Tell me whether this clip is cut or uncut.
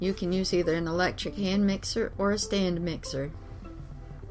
cut